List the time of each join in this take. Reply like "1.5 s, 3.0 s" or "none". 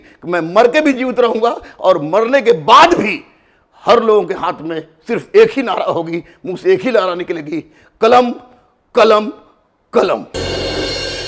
10.3 s

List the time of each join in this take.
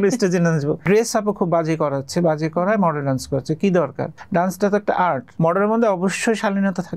0.8 s, 4.1 s, 5.3 s

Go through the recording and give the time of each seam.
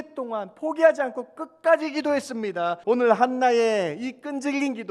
2.8 s

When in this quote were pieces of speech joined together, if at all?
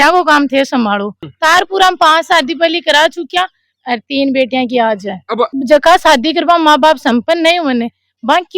1.2 s, 5.5 s

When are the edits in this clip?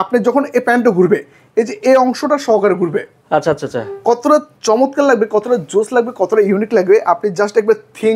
none

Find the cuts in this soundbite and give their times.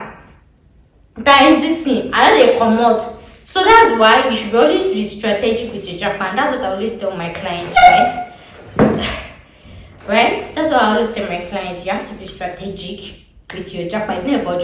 none

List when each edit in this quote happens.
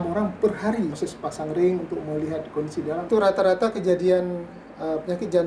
1.0 s, 3.1 s

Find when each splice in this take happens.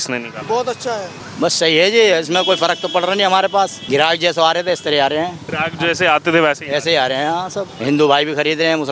1.2 s, 3.8 s, 5.4 s, 7.7 s

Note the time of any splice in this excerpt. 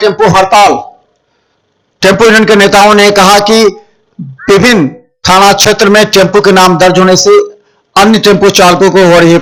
none

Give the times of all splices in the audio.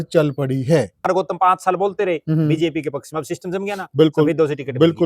1.1 s

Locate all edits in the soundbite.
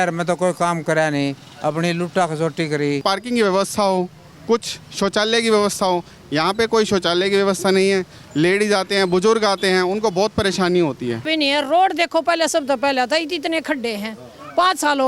3.0 s, 11.3 s

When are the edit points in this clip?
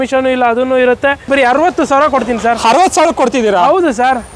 1.3 s

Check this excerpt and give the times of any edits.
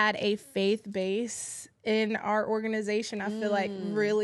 none

